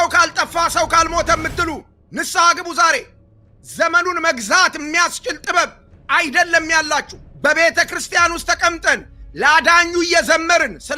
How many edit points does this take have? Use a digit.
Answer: 1